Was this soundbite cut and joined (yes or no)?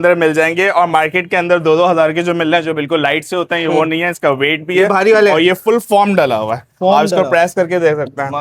no